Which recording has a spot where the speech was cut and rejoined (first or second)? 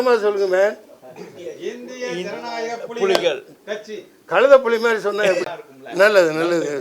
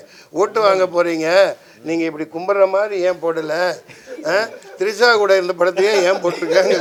first